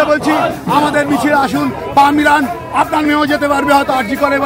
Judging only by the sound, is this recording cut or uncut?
uncut